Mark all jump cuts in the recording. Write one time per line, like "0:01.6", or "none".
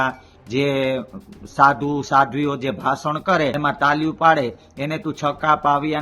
0:03.6